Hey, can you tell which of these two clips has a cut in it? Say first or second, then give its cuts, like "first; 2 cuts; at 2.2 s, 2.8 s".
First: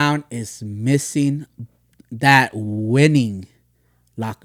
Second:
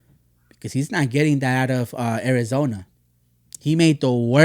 second; 1 cut; at 2.9 s